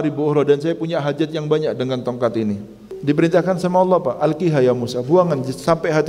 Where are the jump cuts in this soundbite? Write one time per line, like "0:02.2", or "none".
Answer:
0:02.9